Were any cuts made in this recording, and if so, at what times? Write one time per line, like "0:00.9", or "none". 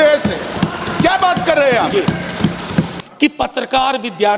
0:03.0